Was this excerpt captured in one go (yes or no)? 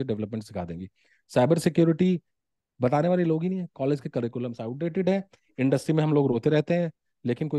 yes